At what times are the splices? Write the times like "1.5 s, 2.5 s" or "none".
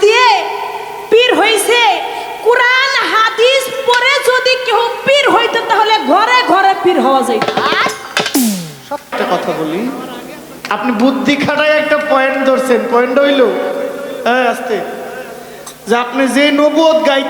9.0 s